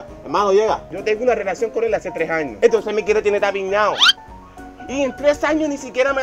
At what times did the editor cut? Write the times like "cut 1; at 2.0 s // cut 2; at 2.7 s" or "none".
cut 1; at 0.9 s